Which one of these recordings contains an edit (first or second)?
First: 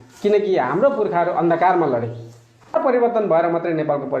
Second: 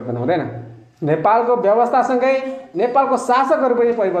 first